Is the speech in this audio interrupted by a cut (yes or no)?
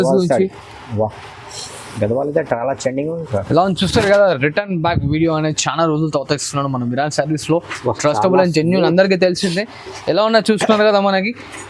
no